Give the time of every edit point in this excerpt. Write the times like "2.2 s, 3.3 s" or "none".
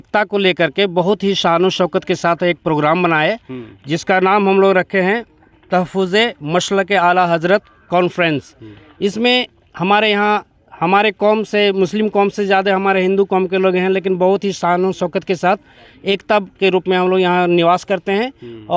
none